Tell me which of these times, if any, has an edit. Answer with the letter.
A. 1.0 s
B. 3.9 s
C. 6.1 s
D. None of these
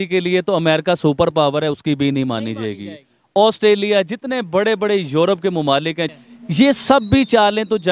C